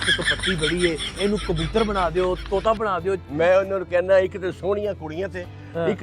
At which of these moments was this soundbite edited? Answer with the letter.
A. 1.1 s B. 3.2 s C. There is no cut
B